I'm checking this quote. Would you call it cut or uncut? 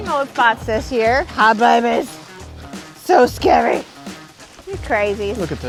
uncut